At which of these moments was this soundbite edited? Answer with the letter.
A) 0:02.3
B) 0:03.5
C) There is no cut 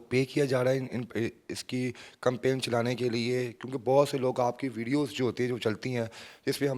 C